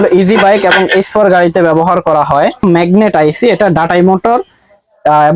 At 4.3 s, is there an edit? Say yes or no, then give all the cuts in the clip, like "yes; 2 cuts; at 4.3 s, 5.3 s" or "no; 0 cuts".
no; 1 cut; at 2.6 s